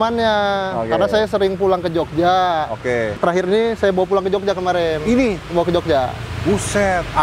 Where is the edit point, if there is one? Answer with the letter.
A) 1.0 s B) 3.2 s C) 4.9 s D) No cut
B